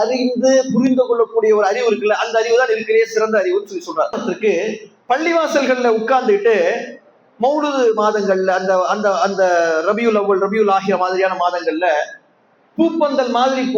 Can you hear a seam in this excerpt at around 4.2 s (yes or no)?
yes